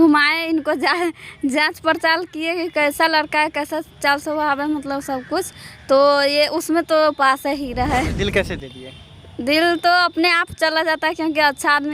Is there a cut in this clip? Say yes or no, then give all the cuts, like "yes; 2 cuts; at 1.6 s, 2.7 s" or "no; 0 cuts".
yes; 1 cut; at 8.1 s